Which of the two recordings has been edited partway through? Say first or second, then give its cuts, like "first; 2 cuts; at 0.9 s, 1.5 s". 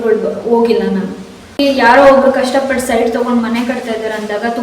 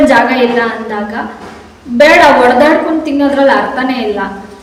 first; 1 cut; at 1.6 s